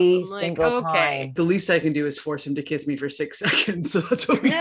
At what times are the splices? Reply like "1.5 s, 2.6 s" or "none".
1.3 s

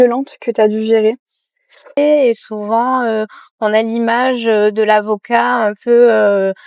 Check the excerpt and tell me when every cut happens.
2.0 s

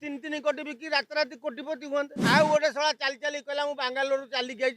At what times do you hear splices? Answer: 2.2 s

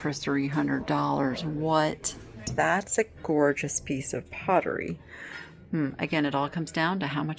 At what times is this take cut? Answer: 2.5 s

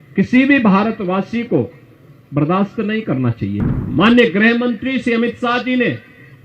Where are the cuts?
3.6 s

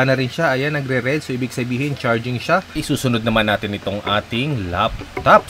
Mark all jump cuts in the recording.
2.8 s

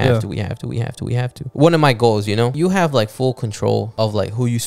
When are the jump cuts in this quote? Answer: 1.4 s, 2.5 s, 3.9 s

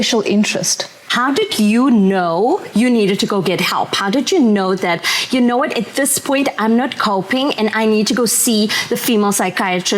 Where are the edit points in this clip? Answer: 1.1 s

